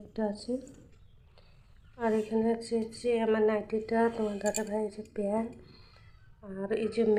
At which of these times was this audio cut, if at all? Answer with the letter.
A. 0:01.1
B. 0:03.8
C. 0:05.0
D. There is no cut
D